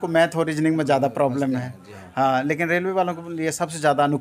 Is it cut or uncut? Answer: uncut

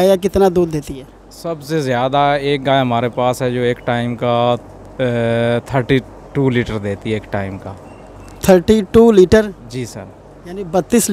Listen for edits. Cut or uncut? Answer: uncut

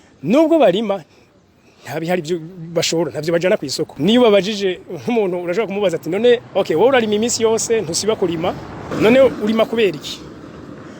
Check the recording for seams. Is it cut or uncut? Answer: cut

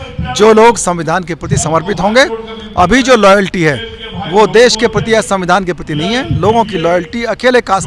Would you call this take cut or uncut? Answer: uncut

